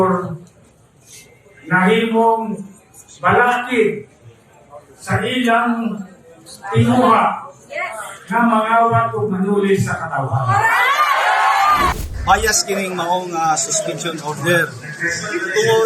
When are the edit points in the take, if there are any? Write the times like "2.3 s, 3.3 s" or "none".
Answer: 12.1 s